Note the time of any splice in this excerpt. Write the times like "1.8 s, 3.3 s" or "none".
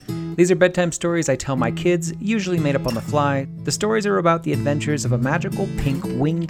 3.5 s